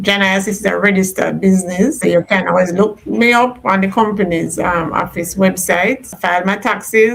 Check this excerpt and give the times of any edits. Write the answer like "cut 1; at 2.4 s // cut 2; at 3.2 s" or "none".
cut 1; at 2.0 s // cut 2; at 6.1 s